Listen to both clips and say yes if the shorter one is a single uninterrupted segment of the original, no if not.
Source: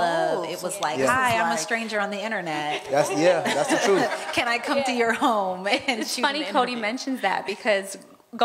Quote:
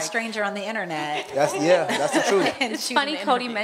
no